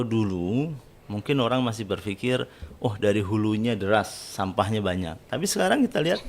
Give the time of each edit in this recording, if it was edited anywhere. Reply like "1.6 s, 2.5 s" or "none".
5.2 s